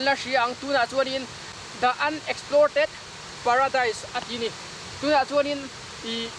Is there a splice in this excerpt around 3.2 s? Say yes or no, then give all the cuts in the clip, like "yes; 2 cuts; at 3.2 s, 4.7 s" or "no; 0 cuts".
no; 1 cut; at 1.4 s